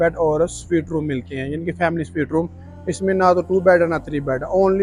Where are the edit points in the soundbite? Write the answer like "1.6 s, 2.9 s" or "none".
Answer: none